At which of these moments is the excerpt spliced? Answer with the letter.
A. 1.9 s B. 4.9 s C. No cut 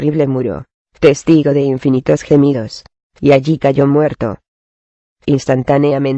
A